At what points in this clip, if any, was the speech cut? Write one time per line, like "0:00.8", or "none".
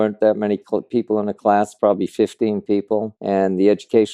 0:03.1